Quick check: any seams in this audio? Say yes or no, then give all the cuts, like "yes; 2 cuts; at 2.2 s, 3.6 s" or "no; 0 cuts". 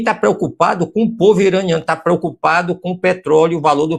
no; 0 cuts